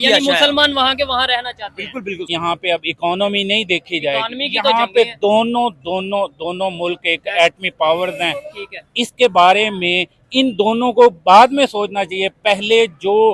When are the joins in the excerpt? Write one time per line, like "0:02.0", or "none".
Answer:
0:02.3